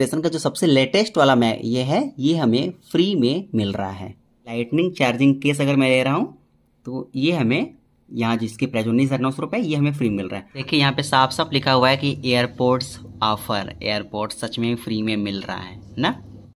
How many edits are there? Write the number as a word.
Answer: two